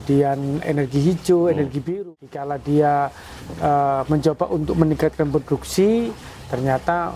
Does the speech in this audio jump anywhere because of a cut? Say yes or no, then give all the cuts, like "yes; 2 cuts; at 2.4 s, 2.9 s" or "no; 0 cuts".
yes; 1 cut; at 1.9 s